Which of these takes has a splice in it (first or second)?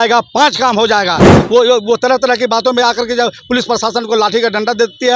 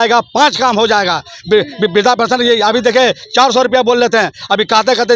first